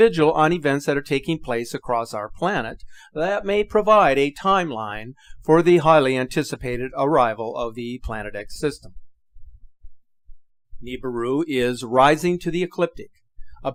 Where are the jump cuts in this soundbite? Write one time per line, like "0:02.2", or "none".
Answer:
none